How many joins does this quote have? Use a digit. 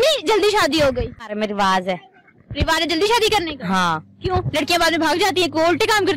1